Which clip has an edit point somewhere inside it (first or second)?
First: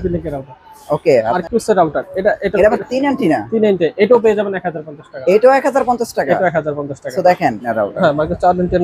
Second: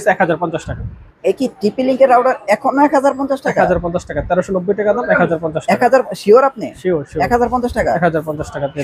first